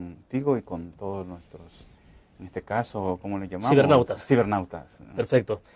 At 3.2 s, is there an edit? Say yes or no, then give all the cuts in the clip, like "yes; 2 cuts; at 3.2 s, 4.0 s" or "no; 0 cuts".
yes; 1 cut; at 3.2 s